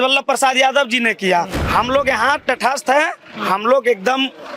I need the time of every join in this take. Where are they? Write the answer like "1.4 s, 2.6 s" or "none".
1.6 s